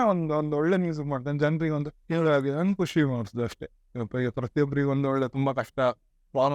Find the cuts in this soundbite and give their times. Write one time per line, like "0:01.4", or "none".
0:01.9